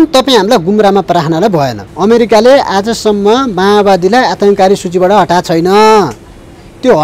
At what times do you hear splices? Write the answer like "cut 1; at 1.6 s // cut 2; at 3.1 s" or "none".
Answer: cut 1; at 1.8 s